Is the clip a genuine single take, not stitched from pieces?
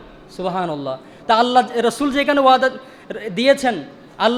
yes; 0 cuts

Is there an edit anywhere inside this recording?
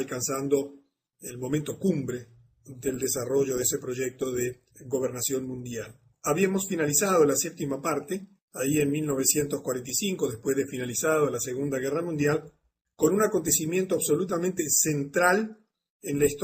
no; 0 cuts

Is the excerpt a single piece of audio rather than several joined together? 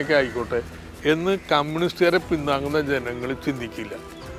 yes; 0 cuts

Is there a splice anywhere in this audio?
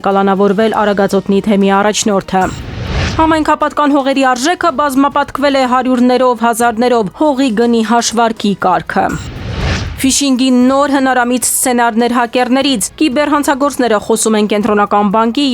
yes; 1 cut; at 9.8 s

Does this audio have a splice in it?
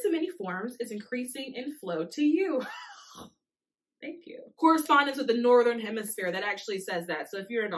yes; 1 cut; at 4.8 s

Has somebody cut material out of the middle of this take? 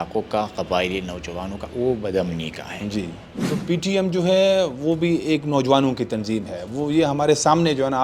yes; 1 cut; at 3.3 s

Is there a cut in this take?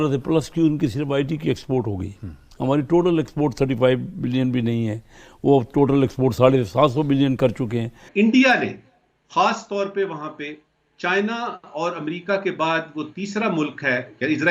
yes; 1 cut; at 8.0 s

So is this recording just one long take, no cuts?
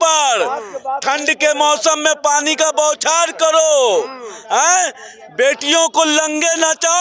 yes; 0 cuts

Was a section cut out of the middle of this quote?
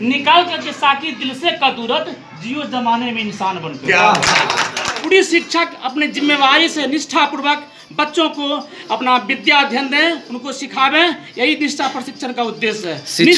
yes; 1 cut; at 4.9 s

